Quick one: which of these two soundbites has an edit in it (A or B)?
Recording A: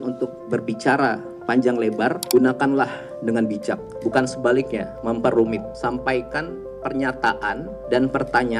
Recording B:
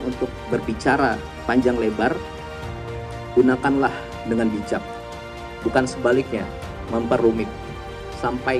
A